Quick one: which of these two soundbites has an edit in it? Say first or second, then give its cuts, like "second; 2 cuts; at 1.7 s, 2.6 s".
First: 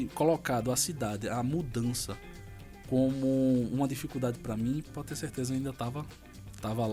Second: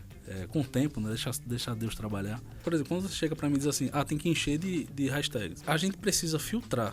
second; 2 cuts; at 2.6 s, 5.5 s